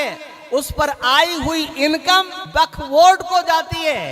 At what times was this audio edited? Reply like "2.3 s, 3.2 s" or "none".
2.4 s